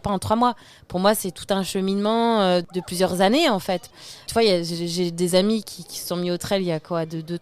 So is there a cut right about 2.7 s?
yes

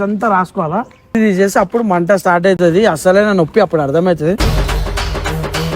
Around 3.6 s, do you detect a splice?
no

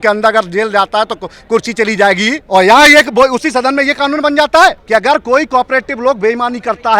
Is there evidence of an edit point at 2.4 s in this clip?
yes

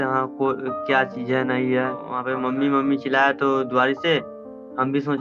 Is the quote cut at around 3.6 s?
no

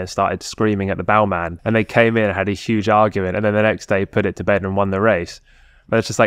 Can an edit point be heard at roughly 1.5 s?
yes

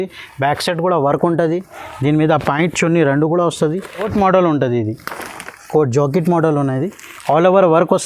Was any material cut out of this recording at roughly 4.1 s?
yes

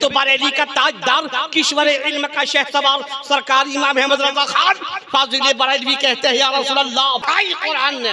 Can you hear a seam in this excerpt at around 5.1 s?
no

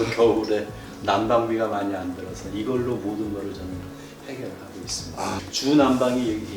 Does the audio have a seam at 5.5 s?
yes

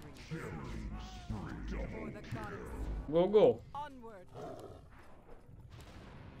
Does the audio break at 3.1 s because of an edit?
yes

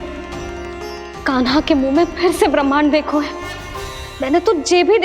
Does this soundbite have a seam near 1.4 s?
no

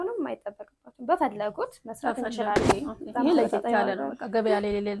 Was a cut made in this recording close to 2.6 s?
yes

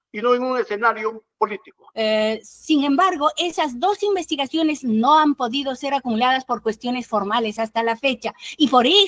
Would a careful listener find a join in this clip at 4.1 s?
no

